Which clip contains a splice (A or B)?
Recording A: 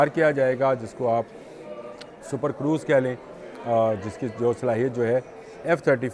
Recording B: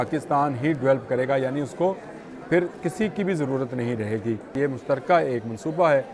B